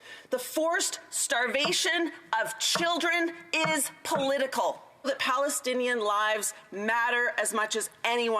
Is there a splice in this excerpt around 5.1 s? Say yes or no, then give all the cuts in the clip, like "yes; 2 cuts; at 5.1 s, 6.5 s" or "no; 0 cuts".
yes; 1 cut; at 5.1 s